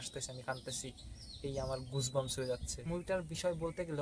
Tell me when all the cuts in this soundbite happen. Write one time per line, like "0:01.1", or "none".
0:02.7